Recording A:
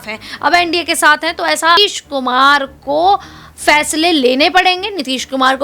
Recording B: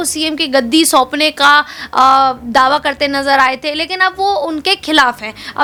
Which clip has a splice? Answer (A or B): A